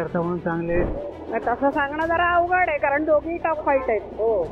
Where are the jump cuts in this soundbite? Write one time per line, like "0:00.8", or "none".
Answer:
0:01.0